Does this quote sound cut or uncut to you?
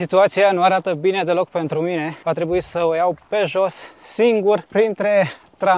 cut